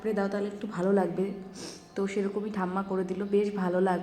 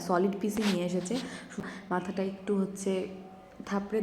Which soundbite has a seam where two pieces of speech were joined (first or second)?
second